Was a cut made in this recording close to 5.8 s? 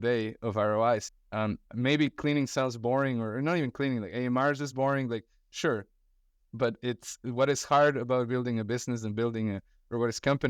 no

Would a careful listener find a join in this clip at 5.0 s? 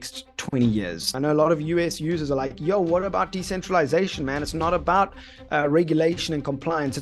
no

